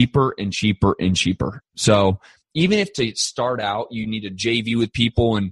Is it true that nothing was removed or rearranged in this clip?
yes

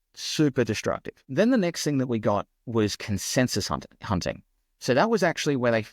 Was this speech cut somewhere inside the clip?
yes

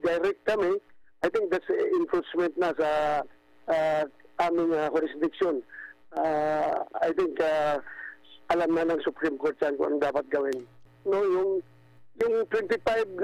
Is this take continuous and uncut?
no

